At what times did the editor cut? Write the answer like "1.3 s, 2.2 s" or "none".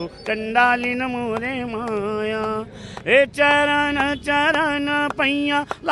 none